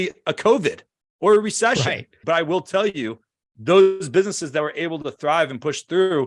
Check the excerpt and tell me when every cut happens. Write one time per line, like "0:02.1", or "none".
0:02.1

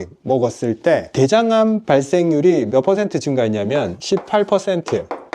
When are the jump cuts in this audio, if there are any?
0:01.1

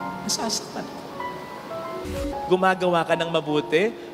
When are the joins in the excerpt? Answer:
0:02.3

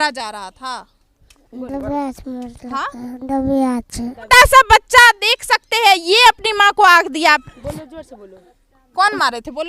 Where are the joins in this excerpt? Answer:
0:04.3
0:07.4

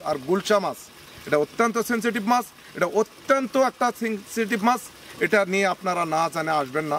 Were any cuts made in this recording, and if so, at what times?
none

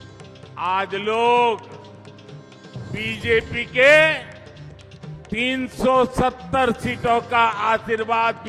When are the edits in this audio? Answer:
none

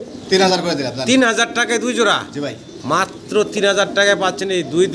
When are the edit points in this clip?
none

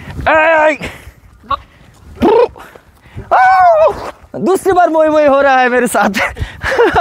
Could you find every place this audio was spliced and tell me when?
none

